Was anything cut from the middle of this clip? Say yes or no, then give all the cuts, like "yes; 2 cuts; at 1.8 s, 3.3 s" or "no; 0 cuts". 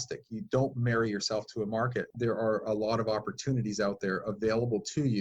yes; 1 cut; at 2.1 s